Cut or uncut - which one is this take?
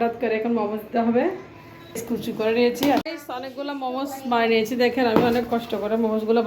cut